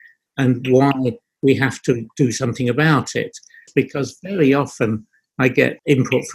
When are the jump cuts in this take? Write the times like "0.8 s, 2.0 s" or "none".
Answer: 3.7 s